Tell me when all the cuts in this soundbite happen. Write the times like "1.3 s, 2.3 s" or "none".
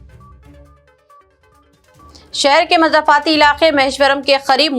0.9 s